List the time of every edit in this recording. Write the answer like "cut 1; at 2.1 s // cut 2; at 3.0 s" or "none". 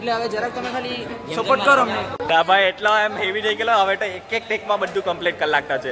cut 1; at 2.1 s